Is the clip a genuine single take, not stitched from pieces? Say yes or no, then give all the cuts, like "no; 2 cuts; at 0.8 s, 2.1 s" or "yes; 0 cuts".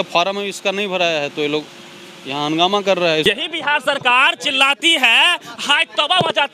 no; 1 cut; at 3.2 s